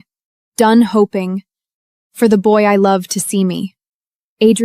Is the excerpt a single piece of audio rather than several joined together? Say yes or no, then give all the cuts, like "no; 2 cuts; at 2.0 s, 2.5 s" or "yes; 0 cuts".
yes; 0 cuts